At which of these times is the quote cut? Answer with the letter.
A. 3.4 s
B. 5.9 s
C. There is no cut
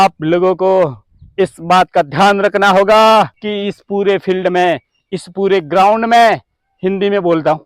A